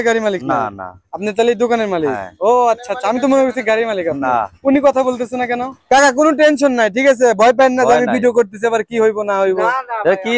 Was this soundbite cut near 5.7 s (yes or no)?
yes